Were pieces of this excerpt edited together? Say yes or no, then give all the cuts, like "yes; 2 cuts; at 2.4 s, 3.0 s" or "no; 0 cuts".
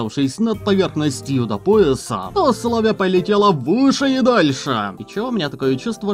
yes; 2 cuts; at 2.2 s, 5.0 s